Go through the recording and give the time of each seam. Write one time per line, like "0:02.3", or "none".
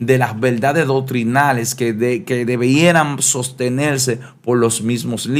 none